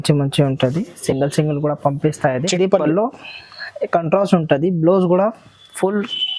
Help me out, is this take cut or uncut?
cut